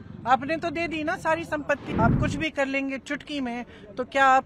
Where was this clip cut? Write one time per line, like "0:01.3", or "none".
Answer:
0:01.9